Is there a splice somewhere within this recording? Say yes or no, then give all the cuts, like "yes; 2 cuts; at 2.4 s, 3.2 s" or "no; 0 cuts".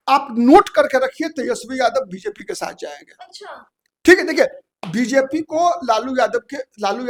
no; 0 cuts